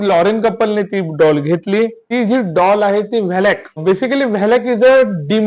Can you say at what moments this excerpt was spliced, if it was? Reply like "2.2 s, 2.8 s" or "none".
2.0 s, 3.8 s